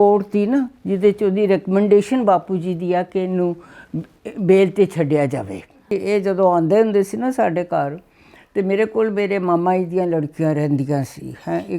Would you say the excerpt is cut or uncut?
cut